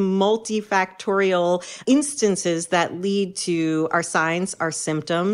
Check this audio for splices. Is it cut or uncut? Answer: cut